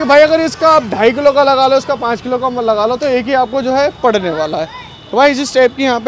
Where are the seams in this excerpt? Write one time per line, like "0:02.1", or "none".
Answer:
none

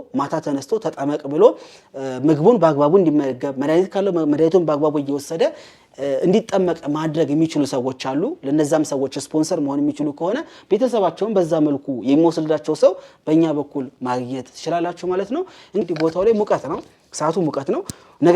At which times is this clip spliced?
0:15.8

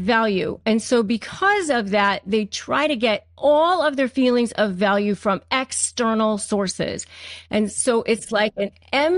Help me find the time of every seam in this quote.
none

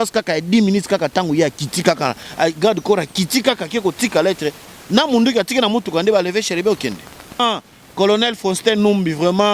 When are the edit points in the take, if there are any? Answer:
0:07.4

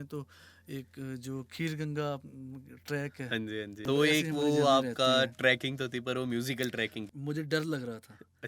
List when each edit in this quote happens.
0:03.8
0:07.1

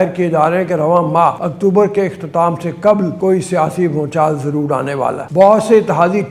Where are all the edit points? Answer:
0:01.5
0:03.1
0:05.2

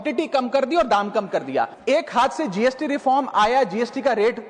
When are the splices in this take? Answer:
0:01.8

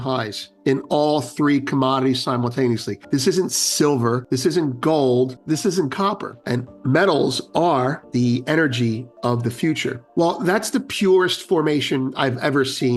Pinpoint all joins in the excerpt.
0:02.9
0:04.2
0:05.4
0:06.3
0:08.0
0:10.1

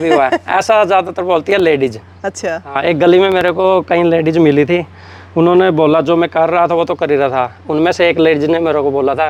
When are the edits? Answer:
none

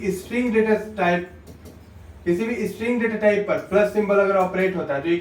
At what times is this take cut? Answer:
none

